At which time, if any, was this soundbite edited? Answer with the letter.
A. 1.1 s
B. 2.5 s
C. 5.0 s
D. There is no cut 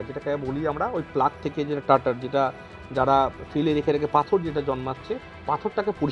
D